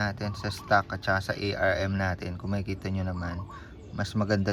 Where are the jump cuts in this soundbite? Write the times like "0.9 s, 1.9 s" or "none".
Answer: none